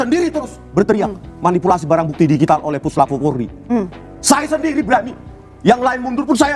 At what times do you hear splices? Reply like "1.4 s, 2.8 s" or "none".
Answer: none